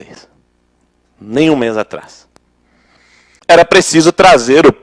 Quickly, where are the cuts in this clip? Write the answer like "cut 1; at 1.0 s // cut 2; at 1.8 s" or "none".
cut 1; at 3.3 s